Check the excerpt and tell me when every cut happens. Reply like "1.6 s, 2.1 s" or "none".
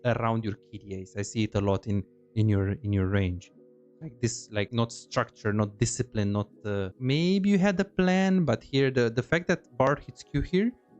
4.7 s, 6.9 s